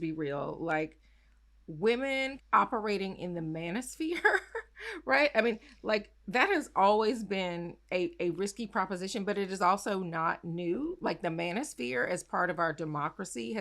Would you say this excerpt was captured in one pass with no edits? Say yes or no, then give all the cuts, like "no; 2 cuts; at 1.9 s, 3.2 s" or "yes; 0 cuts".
no; 1 cut; at 2.4 s